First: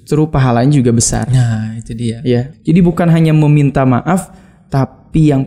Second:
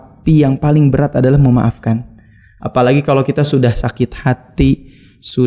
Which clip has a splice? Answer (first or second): first